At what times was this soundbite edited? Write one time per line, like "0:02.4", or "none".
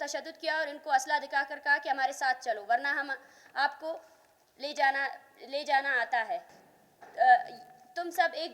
0:06.6